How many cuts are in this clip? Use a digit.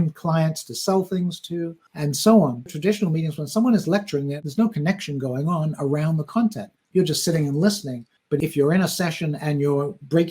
2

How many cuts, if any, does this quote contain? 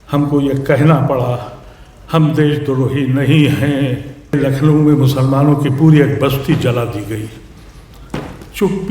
1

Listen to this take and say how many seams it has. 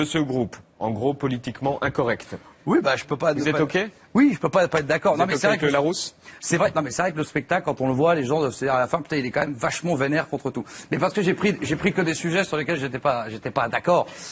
1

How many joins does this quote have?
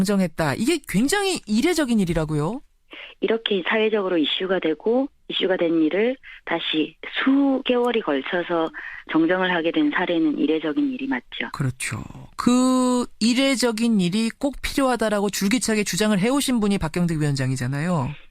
1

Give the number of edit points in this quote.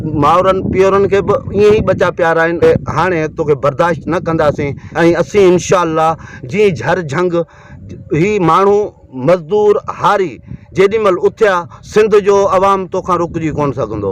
3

